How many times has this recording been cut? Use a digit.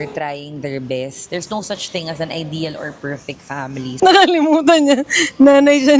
2